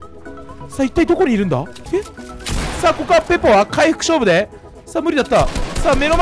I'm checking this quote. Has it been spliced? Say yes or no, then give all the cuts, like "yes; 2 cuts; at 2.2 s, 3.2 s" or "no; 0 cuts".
yes; 1 cut; at 1.8 s